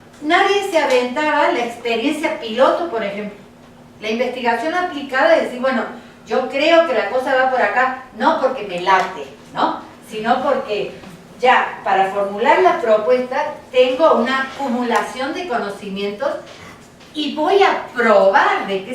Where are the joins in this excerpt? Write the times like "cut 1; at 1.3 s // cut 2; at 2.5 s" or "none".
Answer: cut 1; at 2.9 s